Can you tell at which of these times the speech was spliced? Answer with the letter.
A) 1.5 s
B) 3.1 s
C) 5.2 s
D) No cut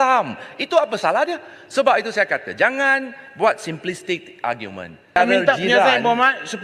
C